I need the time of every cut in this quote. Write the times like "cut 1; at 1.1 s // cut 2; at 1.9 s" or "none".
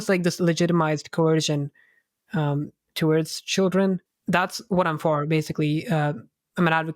cut 1; at 4.1 s